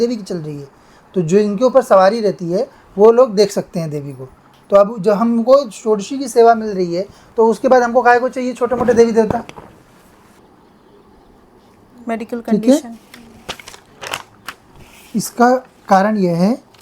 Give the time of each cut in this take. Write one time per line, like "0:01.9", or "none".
0:10.4